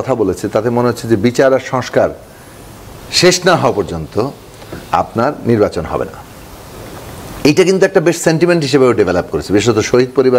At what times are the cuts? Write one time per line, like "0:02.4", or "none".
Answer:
none